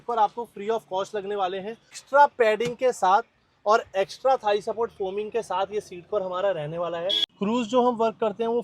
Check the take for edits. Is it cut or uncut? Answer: cut